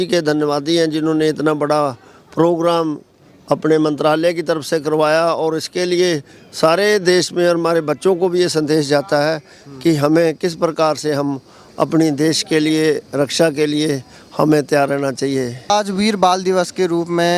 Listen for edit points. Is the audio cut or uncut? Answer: uncut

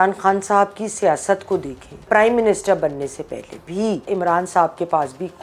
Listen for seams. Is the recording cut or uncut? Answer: cut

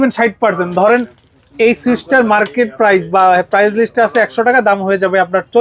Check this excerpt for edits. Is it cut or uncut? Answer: uncut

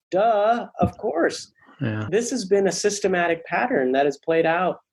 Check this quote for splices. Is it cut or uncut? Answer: cut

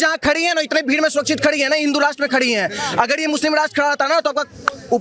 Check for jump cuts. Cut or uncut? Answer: uncut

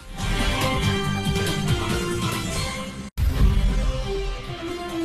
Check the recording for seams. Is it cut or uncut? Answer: uncut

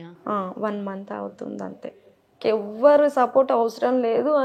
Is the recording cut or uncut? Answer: cut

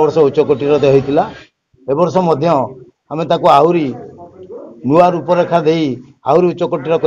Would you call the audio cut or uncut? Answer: uncut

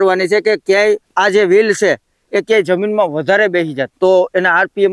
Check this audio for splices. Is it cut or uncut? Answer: cut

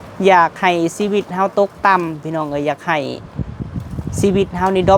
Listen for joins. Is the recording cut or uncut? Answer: uncut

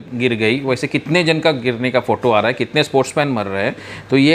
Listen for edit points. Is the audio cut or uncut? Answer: uncut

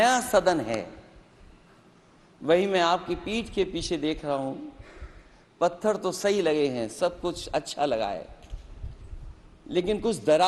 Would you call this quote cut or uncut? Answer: uncut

